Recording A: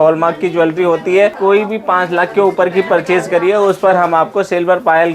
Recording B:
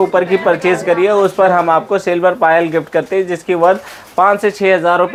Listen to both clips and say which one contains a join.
A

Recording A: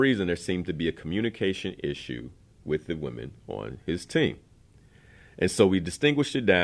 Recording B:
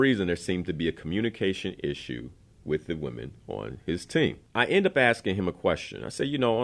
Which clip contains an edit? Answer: B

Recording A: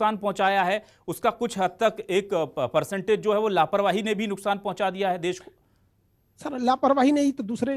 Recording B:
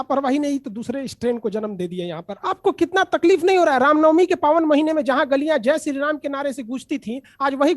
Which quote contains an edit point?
B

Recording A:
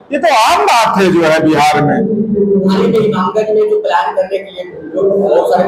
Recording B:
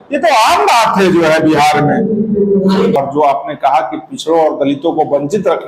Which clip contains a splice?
B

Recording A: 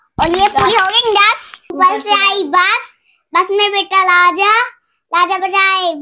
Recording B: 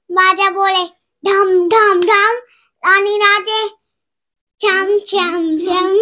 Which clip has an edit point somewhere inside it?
A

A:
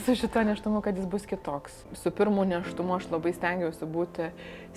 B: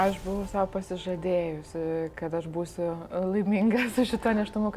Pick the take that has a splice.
A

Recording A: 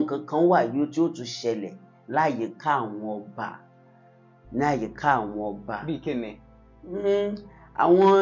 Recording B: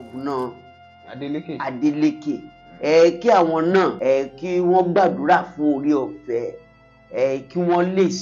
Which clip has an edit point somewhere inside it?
B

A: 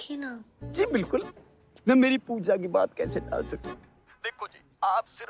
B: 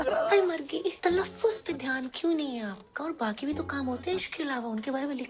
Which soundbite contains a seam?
B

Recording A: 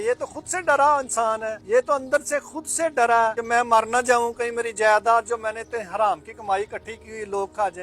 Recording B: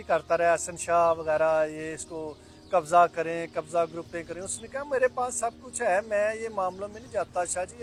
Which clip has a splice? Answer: A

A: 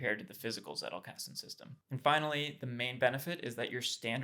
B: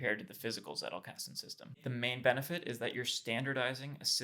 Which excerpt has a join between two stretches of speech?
B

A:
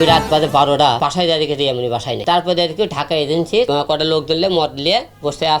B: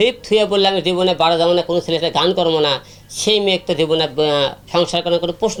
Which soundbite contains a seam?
A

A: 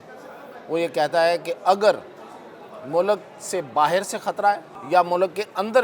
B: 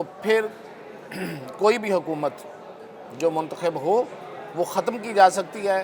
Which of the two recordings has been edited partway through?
A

